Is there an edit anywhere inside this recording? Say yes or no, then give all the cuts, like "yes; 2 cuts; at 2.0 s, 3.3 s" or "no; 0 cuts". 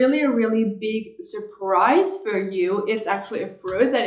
no; 0 cuts